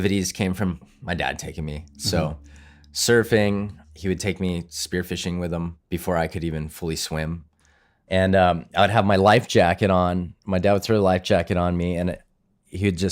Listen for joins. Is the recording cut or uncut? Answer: cut